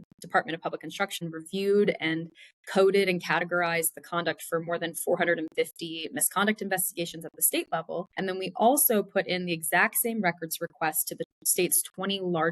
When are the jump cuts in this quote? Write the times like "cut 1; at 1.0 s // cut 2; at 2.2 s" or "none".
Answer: cut 1; at 1.2 s // cut 2; at 8.1 s

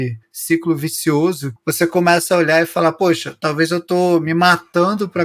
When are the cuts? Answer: cut 1; at 1.5 s

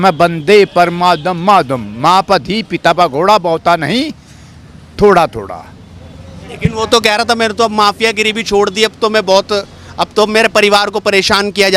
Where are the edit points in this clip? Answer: none

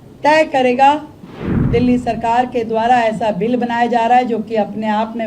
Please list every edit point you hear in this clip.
cut 1; at 1.2 s

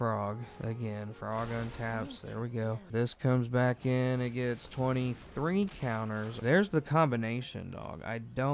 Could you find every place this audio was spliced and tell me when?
cut 1; at 2.9 s // cut 2; at 6.4 s

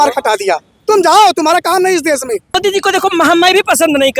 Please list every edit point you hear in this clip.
cut 1; at 2.6 s

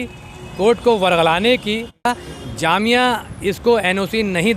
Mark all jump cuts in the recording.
cut 1; at 2.1 s

